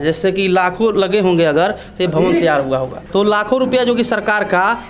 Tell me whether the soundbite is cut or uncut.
uncut